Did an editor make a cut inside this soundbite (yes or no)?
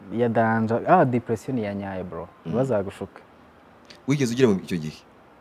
no